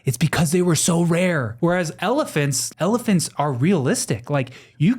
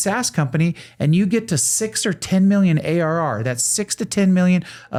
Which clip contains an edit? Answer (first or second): first